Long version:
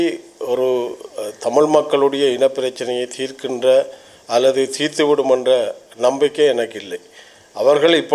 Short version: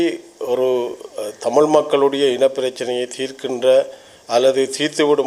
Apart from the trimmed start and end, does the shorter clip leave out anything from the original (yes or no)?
no